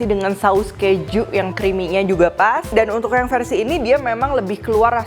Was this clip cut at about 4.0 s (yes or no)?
no